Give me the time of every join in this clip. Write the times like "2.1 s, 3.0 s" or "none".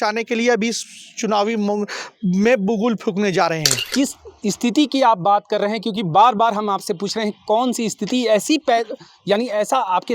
3.9 s